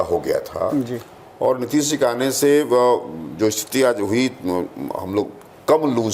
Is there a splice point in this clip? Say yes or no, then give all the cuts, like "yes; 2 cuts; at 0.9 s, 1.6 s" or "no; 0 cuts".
no; 0 cuts